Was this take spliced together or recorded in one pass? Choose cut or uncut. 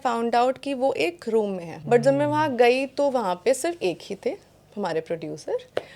cut